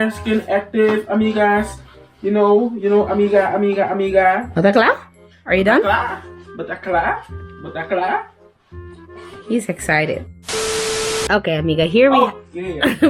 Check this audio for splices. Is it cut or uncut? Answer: cut